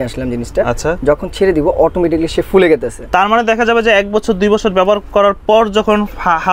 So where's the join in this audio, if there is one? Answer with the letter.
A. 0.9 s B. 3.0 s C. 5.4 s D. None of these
D